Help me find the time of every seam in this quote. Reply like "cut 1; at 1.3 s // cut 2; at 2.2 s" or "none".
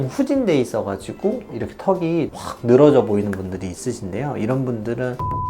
cut 1; at 1.5 s